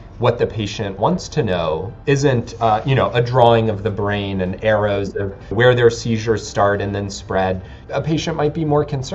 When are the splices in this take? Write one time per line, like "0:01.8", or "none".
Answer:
0:05.5
0:07.7